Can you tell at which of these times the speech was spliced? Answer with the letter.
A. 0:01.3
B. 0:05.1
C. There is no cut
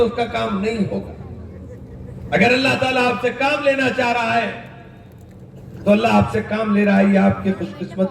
C